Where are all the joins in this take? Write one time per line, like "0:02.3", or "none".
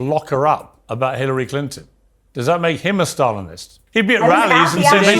0:03.7